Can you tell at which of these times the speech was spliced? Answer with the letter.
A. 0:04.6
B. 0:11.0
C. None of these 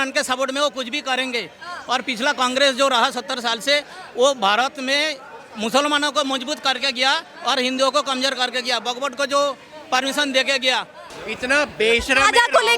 B